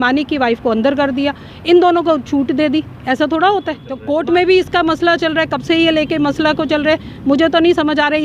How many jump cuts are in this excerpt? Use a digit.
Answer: 1